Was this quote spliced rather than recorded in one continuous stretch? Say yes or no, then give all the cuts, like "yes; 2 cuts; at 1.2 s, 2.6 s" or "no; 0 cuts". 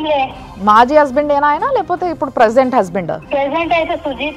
yes; 1 cut; at 3.2 s